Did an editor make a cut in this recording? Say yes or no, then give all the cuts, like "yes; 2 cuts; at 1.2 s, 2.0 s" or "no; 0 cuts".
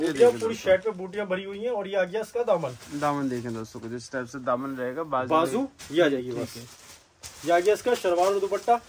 no; 0 cuts